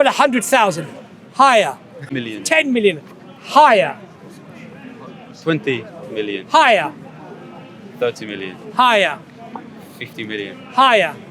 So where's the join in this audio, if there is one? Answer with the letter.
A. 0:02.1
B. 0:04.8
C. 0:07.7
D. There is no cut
A